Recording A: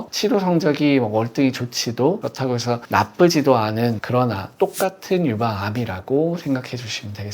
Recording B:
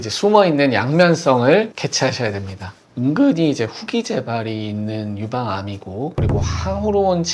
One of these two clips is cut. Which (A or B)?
B